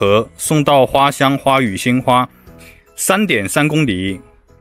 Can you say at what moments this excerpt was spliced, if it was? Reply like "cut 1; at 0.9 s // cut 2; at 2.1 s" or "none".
none